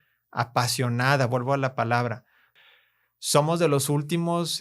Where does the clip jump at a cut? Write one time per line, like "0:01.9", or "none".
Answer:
0:02.5